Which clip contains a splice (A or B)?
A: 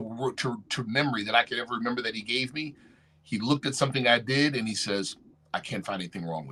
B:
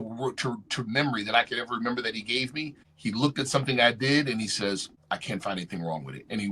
B